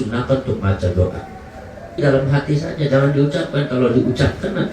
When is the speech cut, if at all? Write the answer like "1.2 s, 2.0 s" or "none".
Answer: 2.0 s